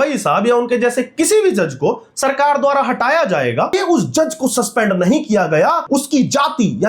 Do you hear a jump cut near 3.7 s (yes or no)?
yes